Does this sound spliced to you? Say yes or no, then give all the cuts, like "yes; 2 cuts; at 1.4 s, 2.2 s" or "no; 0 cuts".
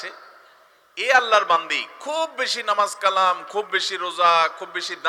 no; 0 cuts